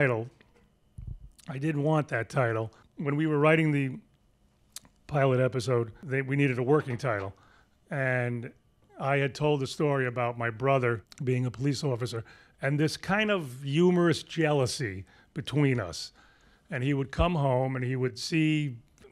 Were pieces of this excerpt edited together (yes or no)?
yes